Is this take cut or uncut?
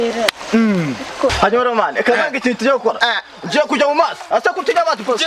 cut